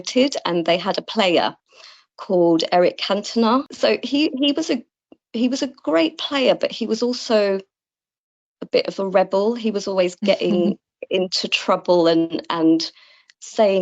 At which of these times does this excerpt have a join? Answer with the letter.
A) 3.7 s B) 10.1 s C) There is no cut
A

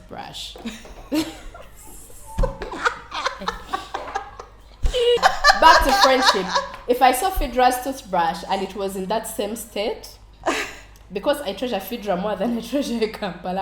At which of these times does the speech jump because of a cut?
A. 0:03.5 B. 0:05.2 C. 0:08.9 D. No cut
B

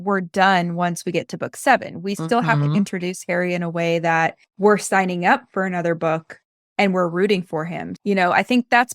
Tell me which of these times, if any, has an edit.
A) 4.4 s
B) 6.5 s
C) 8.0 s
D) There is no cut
A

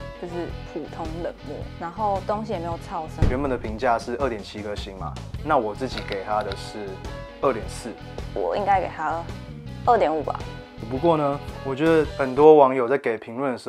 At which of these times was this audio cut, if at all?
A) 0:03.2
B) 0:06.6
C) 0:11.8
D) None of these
A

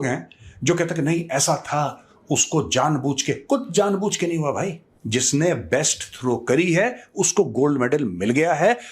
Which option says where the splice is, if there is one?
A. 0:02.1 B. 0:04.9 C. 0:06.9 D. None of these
B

